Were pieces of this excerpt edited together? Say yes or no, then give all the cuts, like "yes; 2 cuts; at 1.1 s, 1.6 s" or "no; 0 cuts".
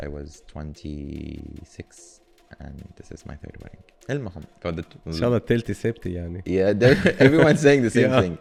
no; 0 cuts